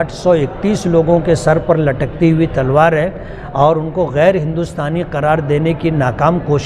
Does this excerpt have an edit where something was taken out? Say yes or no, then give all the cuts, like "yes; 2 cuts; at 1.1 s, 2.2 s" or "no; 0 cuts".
no; 0 cuts